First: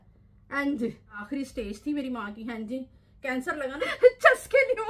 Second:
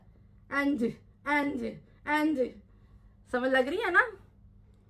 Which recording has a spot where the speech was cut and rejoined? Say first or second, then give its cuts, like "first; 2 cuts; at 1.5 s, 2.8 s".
first; 2 cuts; at 1.2 s, 3.8 s